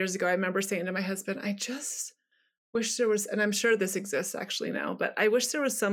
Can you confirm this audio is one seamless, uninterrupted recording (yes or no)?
yes